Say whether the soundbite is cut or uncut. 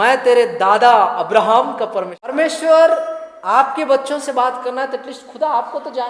cut